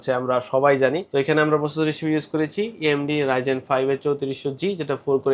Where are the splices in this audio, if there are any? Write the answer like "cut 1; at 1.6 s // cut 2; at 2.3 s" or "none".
cut 1; at 1.0 s